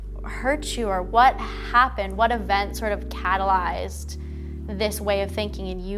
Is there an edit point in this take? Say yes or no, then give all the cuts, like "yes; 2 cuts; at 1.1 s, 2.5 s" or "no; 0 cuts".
no; 0 cuts